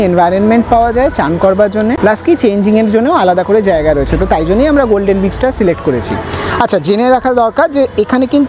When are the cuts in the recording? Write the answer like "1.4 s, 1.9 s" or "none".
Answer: none